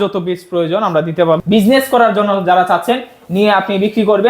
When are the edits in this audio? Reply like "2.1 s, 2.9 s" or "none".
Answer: 1.4 s